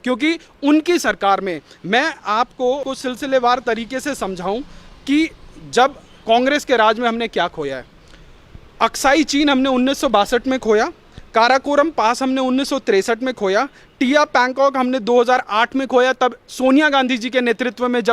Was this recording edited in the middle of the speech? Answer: yes; 1 cut; at 2.9 s

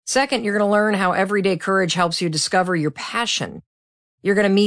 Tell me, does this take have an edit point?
no; 0 cuts

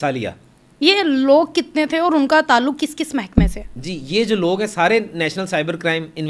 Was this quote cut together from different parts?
no; 0 cuts

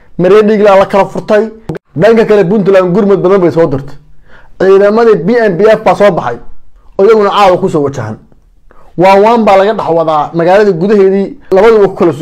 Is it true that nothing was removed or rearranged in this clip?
no; 1 cut; at 1.6 s

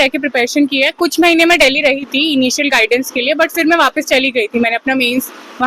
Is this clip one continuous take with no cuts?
yes; 0 cuts

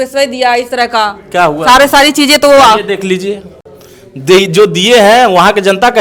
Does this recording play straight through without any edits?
yes; 0 cuts

